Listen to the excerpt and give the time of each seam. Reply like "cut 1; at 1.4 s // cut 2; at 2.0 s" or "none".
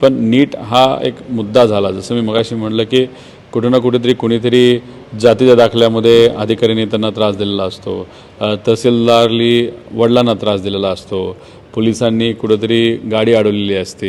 none